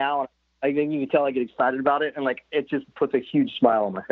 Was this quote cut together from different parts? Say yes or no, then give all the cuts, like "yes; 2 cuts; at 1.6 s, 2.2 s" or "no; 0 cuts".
no; 0 cuts